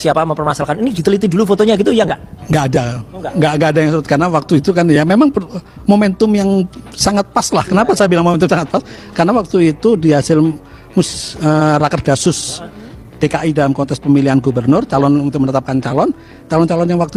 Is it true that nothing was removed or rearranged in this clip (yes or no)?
yes